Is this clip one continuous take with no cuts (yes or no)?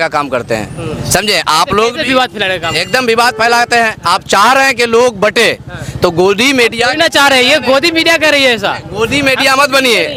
yes